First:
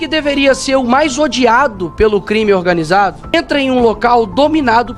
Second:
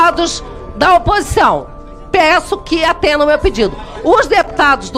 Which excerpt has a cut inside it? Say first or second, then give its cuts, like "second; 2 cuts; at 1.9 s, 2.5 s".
first; 1 cut; at 3.3 s